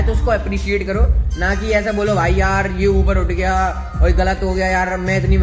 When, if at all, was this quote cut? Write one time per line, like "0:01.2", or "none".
none